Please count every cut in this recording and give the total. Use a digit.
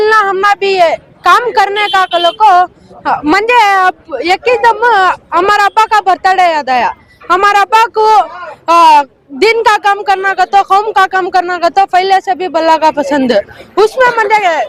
0